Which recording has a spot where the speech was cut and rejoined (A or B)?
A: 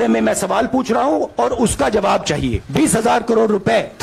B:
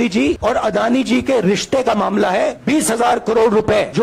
A